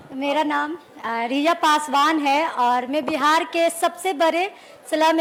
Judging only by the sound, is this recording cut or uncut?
uncut